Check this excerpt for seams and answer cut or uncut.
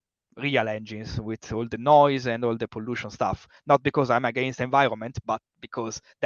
uncut